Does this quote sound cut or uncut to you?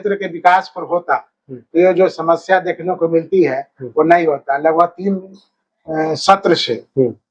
uncut